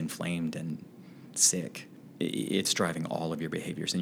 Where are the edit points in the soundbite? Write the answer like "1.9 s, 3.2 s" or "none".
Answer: 1.9 s